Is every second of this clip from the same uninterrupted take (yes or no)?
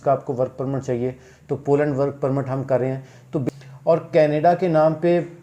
no